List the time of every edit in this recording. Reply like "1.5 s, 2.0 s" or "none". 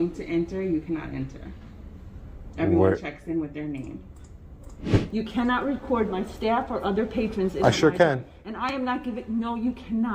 5.0 s